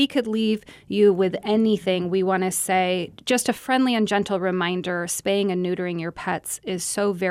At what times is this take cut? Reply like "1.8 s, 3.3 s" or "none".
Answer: 3.1 s